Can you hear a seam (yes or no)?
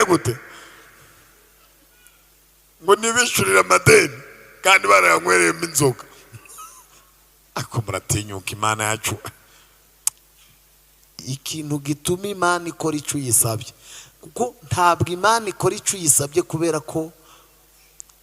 yes